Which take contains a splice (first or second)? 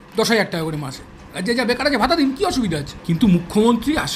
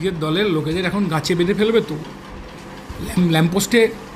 first